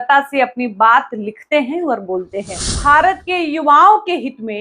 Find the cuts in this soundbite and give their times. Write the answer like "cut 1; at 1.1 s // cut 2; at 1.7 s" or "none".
cut 1; at 2.8 s